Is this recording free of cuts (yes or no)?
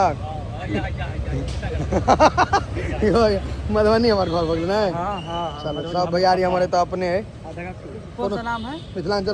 yes